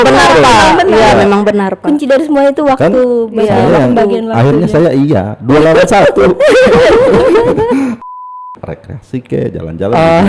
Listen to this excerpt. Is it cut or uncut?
cut